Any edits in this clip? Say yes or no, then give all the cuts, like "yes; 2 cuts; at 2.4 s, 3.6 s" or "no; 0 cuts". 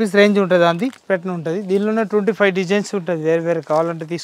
yes; 1 cut; at 1.0 s